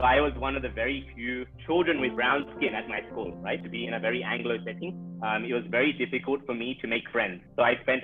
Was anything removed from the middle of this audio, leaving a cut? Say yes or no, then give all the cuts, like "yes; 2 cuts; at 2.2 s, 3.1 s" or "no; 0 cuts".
no; 0 cuts